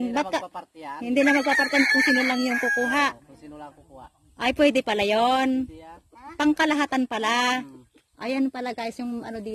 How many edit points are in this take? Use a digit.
0